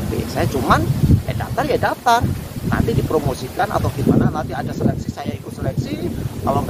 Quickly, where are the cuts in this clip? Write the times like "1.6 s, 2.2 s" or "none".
none